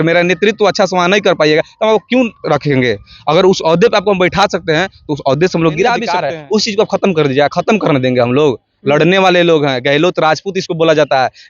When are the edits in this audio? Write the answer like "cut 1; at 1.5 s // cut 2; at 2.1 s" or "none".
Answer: cut 1; at 6.1 s